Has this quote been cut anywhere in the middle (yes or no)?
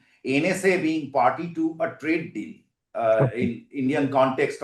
no